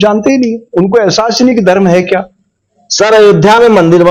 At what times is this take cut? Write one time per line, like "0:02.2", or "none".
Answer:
none

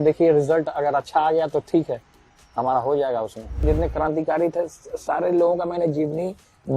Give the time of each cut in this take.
0:03.6

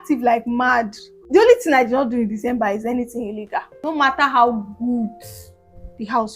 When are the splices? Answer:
0:01.0
0:03.8

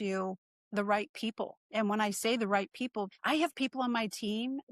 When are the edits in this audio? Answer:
0:03.1

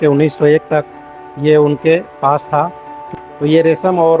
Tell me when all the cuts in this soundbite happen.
0:03.1

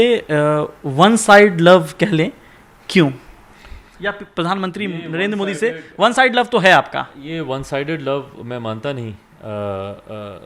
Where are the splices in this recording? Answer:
none

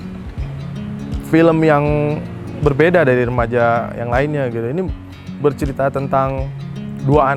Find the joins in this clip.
none

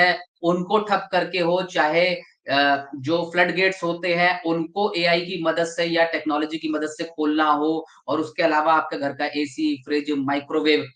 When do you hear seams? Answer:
none

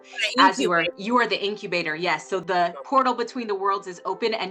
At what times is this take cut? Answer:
0:01.0
0:02.4

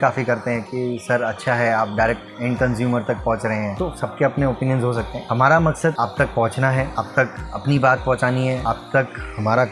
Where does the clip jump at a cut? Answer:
0:03.7
0:05.2
0:06.0
0:06.9
0:08.6

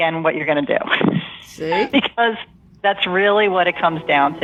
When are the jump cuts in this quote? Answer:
none

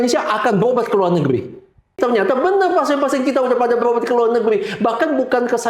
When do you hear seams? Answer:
0:01.9

